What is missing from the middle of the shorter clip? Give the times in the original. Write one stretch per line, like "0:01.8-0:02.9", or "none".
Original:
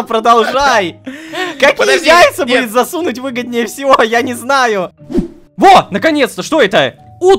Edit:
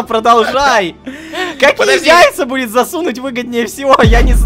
none